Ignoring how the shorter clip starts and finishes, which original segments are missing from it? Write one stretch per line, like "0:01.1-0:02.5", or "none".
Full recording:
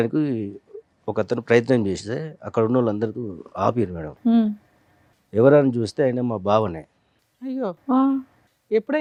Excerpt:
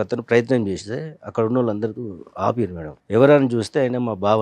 0:04.0-0:05.1